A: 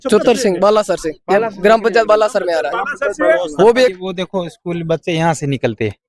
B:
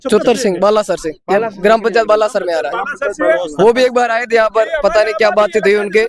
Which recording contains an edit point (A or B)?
A